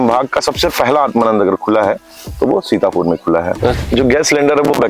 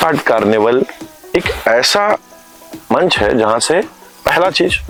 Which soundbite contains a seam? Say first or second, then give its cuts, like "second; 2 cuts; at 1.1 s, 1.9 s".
first; 1 cut; at 3.8 s